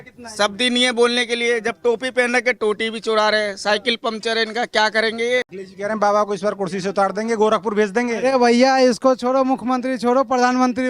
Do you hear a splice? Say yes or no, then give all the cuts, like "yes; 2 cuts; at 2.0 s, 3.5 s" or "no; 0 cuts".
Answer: yes; 1 cut; at 5.6 s